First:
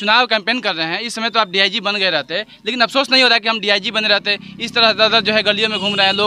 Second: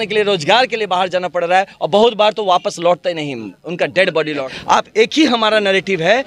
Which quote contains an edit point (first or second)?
second